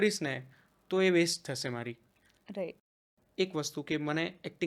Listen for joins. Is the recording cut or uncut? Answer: cut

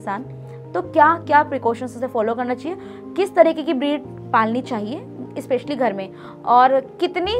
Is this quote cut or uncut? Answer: uncut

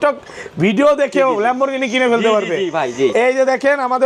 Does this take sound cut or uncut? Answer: uncut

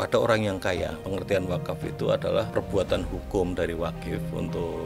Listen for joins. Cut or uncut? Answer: cut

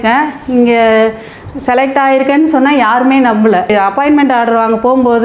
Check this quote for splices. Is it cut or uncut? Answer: cut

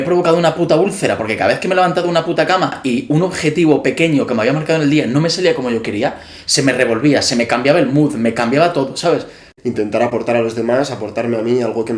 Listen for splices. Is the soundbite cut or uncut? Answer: cut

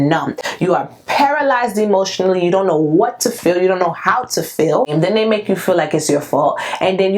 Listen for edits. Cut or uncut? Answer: cut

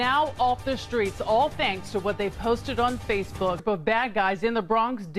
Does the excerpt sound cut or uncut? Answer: uncut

